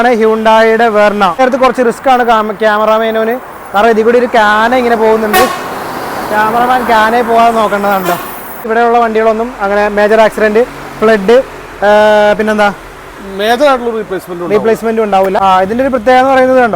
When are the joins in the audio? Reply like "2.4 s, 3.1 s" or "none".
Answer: 1.4 s, 8.7 s, 15.5 s

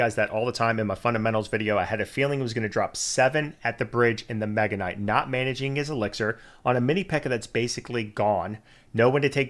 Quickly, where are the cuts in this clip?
none

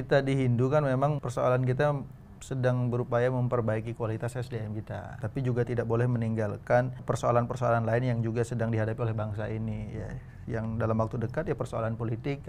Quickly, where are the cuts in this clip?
1.2 s, 5.1 s, 7.0 s

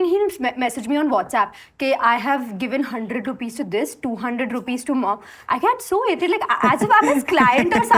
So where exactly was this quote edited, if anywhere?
none

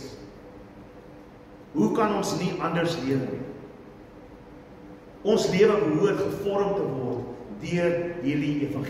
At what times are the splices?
none

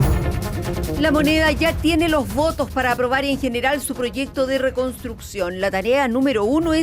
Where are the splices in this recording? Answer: 1.0 s

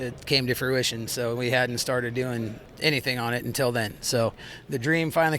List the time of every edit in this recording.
2.6 s, 4.5 s

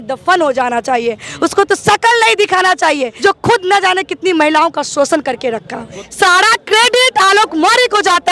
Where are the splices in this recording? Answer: 3.1 s, 6.0 s

